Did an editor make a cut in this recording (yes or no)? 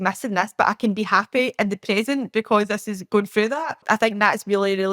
yes